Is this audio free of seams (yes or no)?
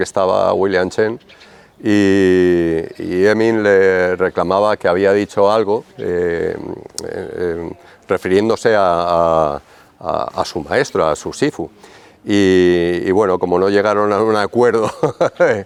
yes